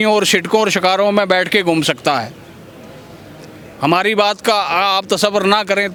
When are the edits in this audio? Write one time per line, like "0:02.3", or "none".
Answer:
none